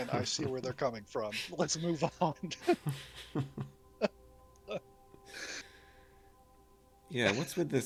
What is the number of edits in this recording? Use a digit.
0